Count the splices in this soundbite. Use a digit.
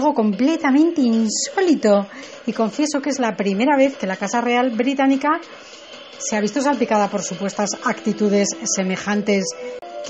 1